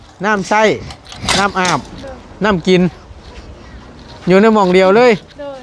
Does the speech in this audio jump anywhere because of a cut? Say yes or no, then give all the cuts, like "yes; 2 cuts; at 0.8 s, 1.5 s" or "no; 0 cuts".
no; 0 cuts